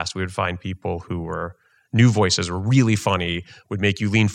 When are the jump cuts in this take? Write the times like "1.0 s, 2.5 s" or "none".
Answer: none

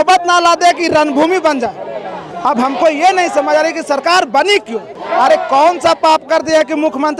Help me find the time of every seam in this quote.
2.2 s, 5.0 s

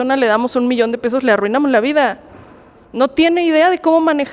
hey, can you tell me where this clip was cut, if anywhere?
none

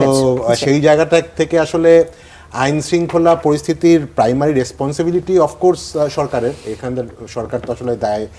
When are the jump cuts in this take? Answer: none

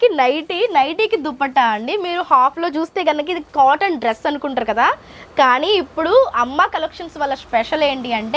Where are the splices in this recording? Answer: none

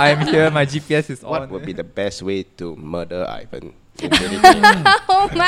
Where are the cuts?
1.2 s

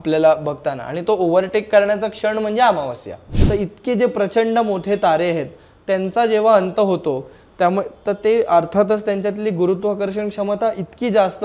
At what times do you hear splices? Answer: 3.3 s

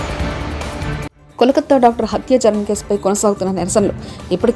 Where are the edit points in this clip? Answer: 1.2 s

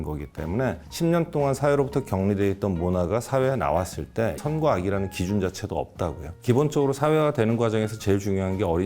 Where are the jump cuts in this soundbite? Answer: 6.4 s

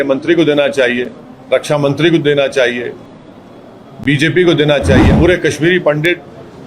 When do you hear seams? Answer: 5.1 s

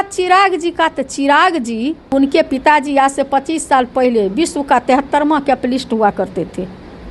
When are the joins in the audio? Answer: 2.1 s

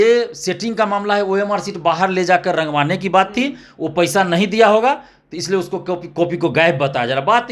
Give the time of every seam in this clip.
none

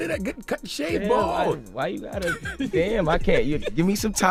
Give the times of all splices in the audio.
none

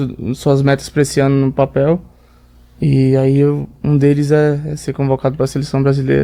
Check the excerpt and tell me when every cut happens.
none

